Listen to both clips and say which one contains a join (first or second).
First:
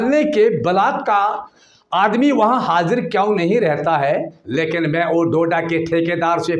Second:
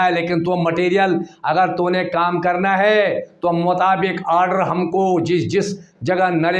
first